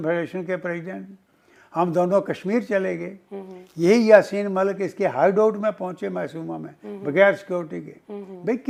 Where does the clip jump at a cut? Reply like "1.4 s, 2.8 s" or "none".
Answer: none